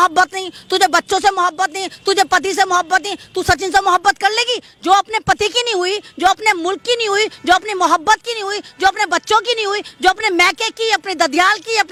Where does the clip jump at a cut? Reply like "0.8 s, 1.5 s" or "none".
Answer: none